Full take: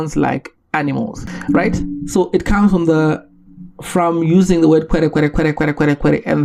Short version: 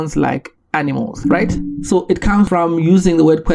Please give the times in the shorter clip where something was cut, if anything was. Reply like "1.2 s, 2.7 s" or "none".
1.1 s, 2.5 s